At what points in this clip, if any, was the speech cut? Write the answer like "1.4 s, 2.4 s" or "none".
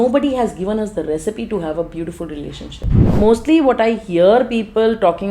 3.1 s